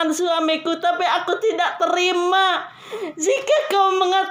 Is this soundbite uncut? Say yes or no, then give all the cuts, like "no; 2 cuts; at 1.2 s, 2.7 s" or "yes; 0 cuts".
yes; 0 cuts